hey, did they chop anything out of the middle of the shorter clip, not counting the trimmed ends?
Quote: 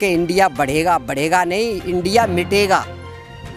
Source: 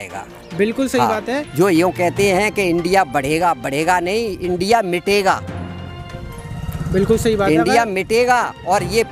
no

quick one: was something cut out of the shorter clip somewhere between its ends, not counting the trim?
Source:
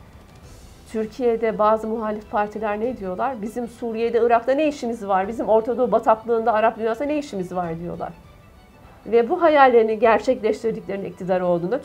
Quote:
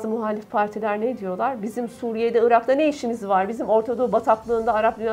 no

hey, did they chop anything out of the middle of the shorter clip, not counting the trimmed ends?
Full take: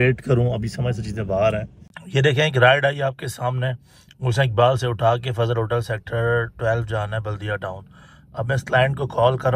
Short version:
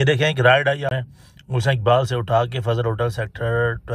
yes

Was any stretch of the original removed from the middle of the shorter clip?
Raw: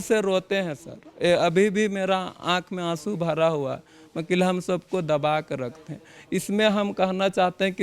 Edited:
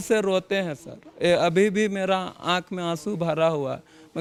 no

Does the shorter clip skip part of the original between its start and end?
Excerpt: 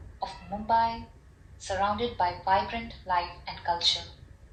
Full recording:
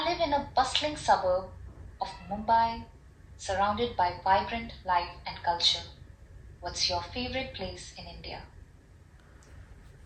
no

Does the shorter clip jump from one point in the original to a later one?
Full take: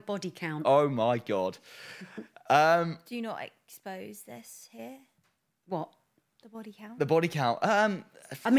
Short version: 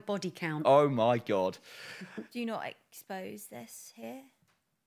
yes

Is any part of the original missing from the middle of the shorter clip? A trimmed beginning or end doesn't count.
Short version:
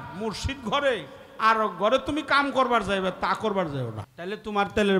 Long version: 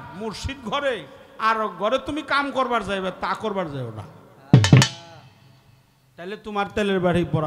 yes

